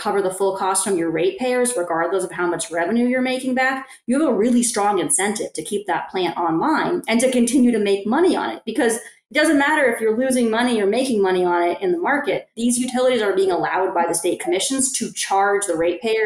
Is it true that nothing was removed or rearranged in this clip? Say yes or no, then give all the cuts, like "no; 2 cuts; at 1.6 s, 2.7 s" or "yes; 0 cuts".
yes; 0 cuts